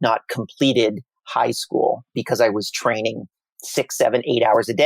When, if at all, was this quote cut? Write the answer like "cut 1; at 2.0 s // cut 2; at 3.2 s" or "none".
cut 1; at 2.1 s